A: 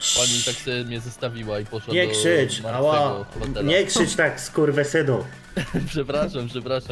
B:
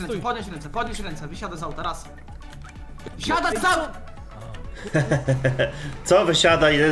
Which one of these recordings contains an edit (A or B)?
A